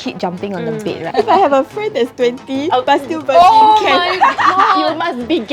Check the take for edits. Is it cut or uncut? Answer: cut